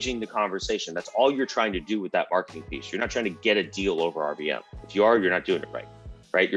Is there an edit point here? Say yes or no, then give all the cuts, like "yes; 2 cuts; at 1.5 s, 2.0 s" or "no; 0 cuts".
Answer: no; 0 cuts